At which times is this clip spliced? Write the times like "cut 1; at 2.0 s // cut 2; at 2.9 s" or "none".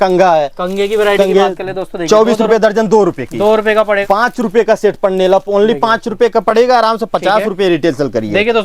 cut 1; at 4.0 s